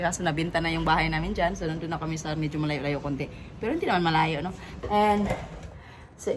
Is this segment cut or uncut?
uncut